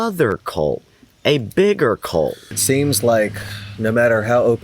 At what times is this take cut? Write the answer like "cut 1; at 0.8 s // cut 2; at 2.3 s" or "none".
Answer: cut 1; at 2.6 s